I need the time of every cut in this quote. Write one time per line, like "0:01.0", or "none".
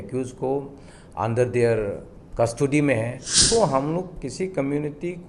0:03.4